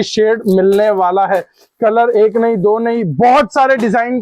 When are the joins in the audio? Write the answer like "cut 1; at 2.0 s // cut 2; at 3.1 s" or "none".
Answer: none